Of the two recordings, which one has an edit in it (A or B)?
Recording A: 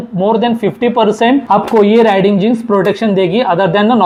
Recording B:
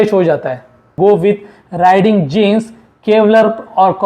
B